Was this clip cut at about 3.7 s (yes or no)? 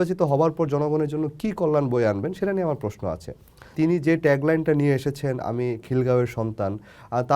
yes